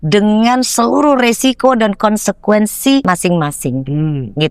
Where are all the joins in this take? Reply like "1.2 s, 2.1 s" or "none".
3.0 s